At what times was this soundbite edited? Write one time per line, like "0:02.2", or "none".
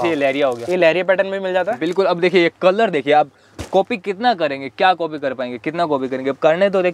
none